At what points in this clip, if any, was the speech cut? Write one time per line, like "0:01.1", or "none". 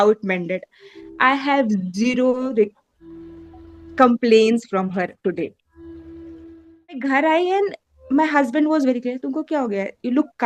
0:07.0